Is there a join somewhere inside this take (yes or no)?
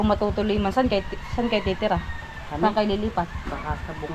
no